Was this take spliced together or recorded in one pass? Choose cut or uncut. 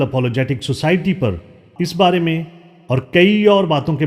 cut